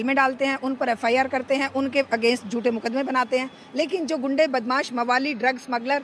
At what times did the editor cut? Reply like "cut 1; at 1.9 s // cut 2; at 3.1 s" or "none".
none

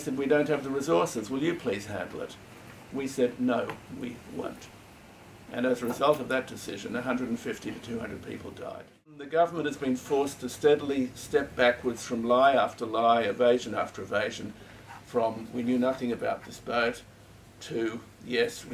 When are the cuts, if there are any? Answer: cut 1; at 9.2 s

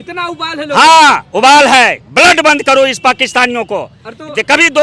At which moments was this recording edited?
none

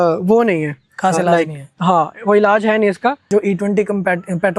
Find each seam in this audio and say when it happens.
cut 1; at 3.2 s

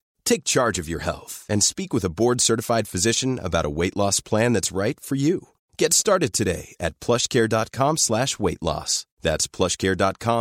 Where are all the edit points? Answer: none

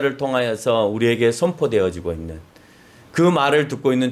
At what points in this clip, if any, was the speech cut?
none

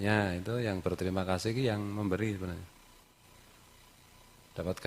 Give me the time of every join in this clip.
cut 1; at 3.2 s

